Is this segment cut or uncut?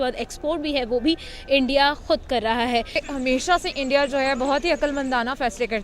cut